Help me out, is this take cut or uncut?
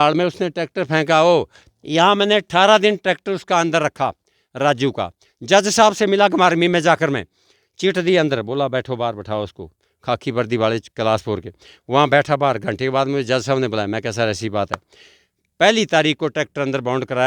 uncut